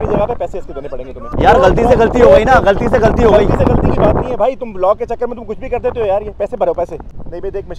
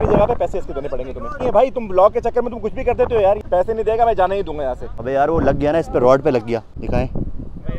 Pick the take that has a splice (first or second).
second